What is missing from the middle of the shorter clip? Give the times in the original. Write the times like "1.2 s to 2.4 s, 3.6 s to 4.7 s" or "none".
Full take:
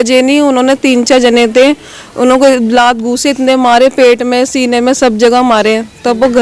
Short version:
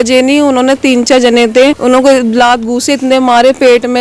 1.8 s to 2.1 s